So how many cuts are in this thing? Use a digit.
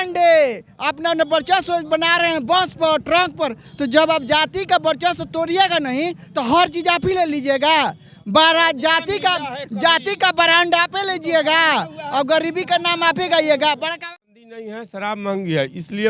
1